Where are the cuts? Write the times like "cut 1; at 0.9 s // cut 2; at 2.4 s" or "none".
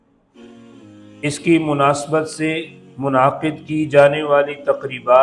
cut 1; at 0.9 s

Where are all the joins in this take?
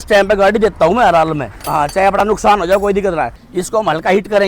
cut 1; at 1.5 s // cut 2; at 3.4 s

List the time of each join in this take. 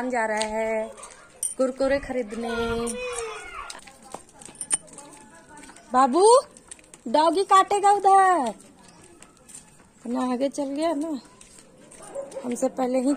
cut 1; at 3.5 s

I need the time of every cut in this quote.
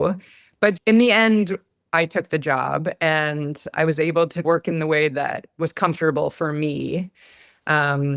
none

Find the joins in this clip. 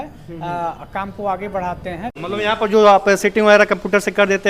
cut 1; at 2.2 s

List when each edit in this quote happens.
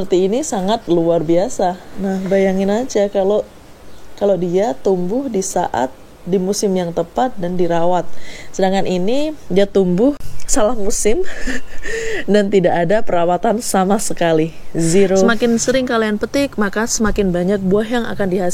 cut 1; at 1.9 s // cut 2; at 10.3 s // cut 3; at 15.3 s

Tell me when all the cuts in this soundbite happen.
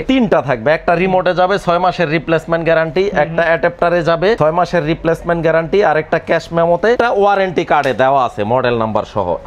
cut 1; at 4.4 s // cut 2; at 7.0 s

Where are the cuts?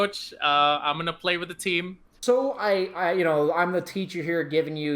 cut 1; at 2.0 s

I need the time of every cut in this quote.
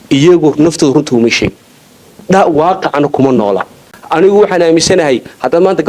cut 1; at 3.9 s

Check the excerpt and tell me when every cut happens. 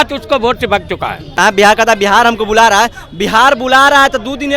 cut 1; at 1.4 s

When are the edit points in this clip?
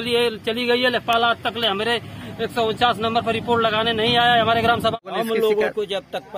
cut 1; at 4.9 s

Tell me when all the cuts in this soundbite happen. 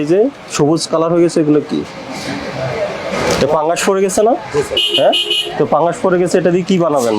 cut 1; at 3.1 s

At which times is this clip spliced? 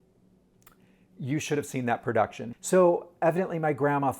cut 1; at 2.5 s

